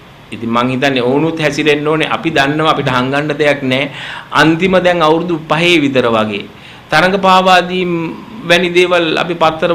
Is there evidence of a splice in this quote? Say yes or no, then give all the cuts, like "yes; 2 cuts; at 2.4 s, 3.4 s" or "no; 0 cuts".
no; 0 cuts